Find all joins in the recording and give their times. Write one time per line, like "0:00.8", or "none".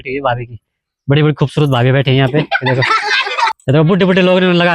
0:03.6